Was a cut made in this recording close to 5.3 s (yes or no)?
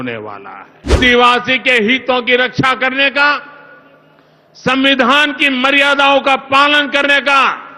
no